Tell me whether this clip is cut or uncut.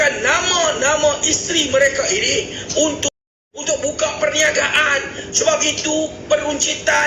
cut